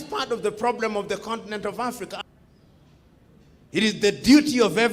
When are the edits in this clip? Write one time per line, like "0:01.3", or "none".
0:02.2